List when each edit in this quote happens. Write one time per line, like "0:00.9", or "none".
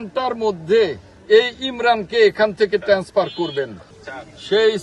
0:01.1
0:03.7